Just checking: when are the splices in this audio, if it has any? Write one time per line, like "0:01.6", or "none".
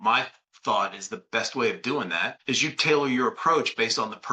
0:02.3